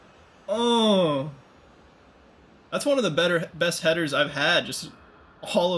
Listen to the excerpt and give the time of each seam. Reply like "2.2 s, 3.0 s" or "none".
none